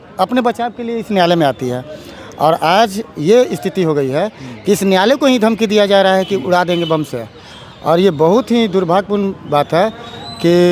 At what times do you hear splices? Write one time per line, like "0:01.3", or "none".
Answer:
none